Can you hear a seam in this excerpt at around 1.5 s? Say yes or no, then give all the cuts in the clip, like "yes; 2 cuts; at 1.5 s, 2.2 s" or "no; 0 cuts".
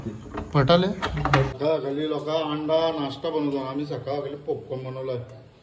yes; 1 cut; at 1.5 s